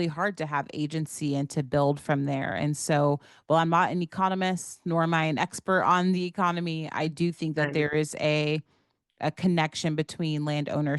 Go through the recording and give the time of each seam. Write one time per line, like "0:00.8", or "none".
none